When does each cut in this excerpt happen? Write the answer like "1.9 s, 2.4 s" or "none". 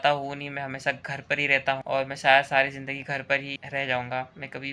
3.6 s